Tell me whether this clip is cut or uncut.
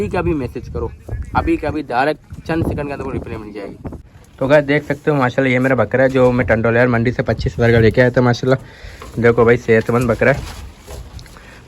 cut